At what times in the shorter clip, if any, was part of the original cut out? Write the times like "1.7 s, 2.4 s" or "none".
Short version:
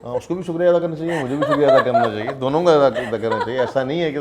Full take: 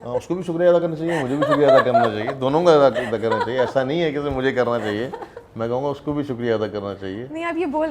none